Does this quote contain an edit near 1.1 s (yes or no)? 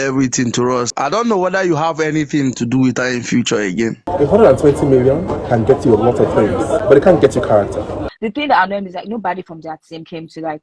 yes